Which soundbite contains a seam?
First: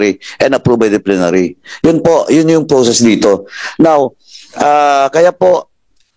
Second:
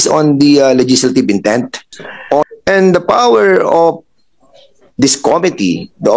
second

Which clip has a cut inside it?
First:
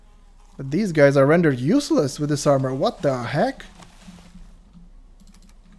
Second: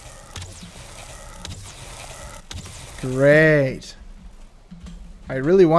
first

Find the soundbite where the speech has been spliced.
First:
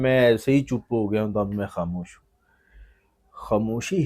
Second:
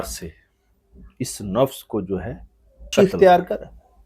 second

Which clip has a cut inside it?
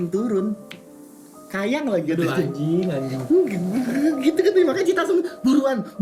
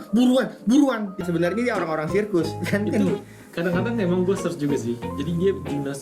second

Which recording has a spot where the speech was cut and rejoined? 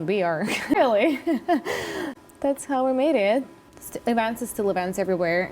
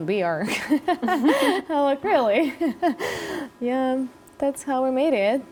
first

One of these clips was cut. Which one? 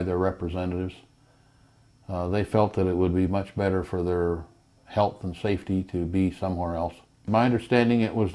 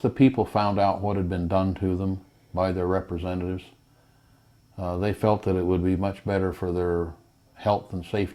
first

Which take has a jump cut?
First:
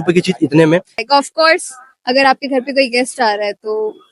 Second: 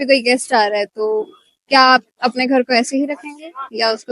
first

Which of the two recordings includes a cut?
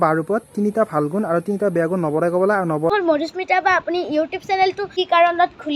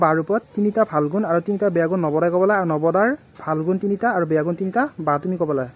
first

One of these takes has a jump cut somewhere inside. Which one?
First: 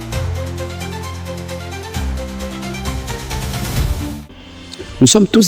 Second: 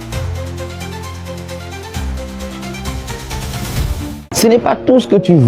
first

